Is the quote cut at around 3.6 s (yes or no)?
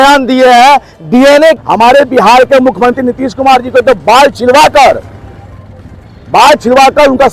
no